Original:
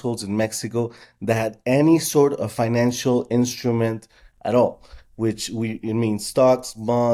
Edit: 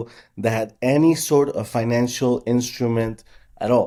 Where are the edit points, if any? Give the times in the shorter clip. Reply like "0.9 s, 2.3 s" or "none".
none